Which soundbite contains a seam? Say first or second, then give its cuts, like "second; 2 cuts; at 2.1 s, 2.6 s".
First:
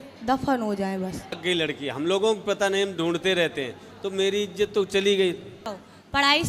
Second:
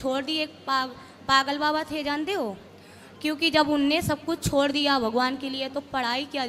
first; 2 cuts; at 1.4 s, 5.6 s